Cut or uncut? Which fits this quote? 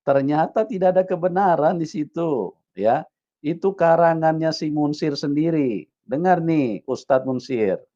uncut